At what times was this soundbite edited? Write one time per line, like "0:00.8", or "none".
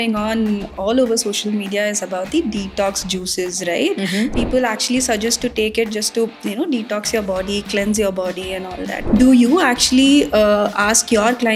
0:04.3
0:09.1